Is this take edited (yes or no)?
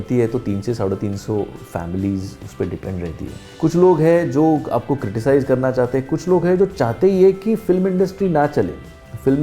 yes